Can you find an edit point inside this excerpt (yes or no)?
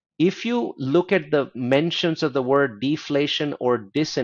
no